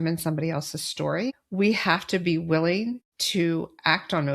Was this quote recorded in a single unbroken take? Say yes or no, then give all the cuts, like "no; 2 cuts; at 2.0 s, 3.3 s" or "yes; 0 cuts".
no; 2 cuts; at 1.4 s, 3.1 s